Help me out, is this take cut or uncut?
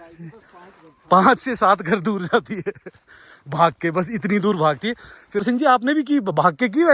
cut